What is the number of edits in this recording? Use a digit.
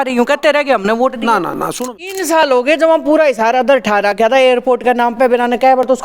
1